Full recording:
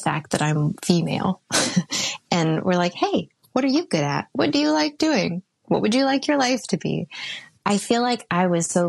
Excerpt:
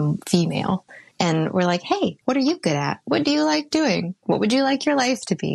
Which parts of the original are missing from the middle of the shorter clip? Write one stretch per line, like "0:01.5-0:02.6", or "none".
0:01.5-0:02.0
0:03.3-0:03.4
0:05.4-0:05.5